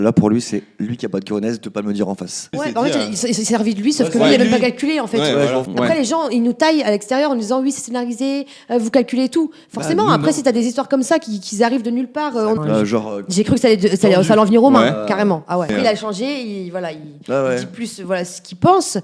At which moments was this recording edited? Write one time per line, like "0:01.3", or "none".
0:02.5
0:05.7
0:12.6
0:15.7